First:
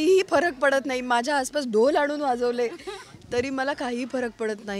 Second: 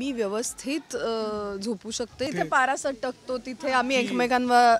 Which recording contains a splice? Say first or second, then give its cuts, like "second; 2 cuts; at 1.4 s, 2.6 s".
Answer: second; 1 cut; at 2.3 s